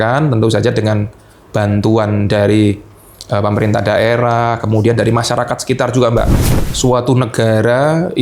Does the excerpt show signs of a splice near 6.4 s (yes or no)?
yes